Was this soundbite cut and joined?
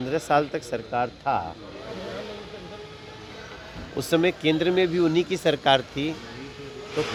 no; 0 cuts

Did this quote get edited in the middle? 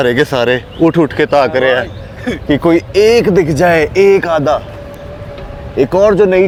no; 0 cuts

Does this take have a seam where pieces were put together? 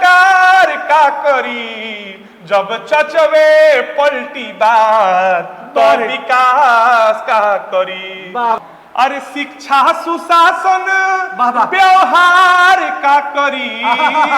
yes; 1 cut; at 8.6 s

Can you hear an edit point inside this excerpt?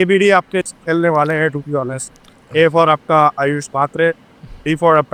no; 0 cuts

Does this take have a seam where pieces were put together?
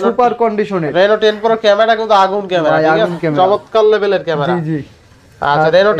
no; 0 cuts

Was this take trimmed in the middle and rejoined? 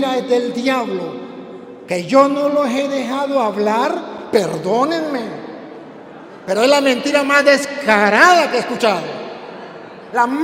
no; 0 cuts

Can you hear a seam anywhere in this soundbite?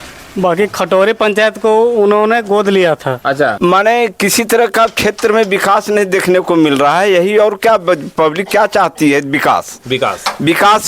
yes; 1 cut; at 3.6 s

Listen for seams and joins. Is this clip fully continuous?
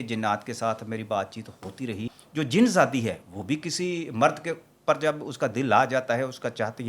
no; 1 cut; at 2.2 s

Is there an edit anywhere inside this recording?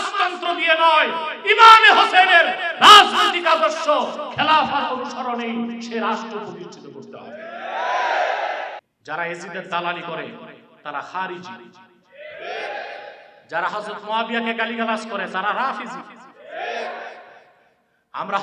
yes; 1 cut; at 8.8 s

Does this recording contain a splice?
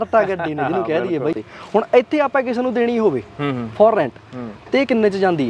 yes; 1 cut; at 1.5 s

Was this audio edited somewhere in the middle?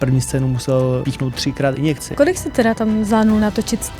yes; 2 cuts; at 1.0 s, 2.1 s

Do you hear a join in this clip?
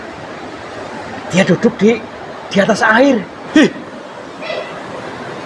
yes; 1 cut; at 3.4 s

